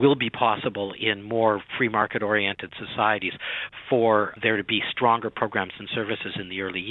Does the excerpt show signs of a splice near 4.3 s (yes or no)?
yes